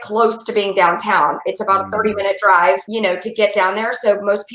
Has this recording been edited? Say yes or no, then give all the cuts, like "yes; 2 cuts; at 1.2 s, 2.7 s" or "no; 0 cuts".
yes; 1 cut; at 2.9 s